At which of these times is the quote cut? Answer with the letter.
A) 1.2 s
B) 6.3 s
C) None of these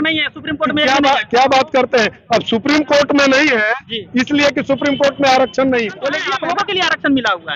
B